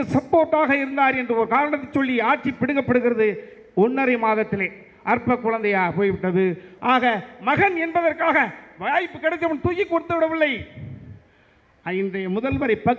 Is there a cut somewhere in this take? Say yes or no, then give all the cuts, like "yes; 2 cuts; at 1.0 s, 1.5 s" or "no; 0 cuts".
yes; 1 cut; at 6.7 s